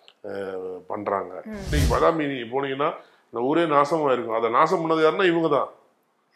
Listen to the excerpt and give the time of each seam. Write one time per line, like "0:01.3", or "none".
0:01.7